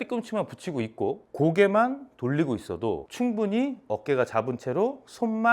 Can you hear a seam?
yes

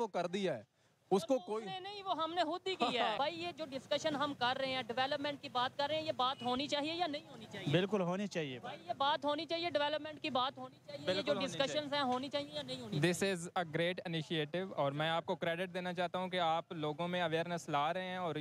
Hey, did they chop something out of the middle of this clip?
yes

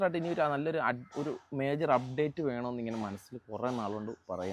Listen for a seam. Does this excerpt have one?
no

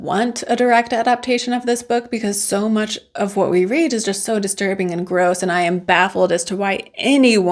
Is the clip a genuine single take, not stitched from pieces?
yes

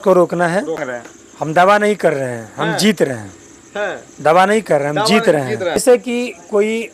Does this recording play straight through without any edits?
no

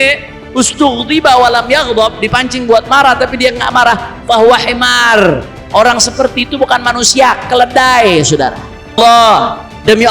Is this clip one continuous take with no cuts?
no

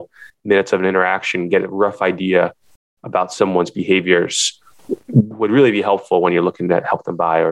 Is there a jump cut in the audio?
no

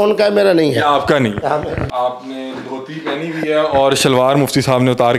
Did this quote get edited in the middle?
yes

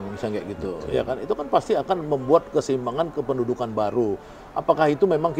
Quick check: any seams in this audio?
no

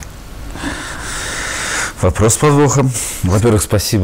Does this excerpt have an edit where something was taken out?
no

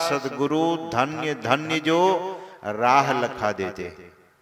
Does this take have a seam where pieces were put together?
no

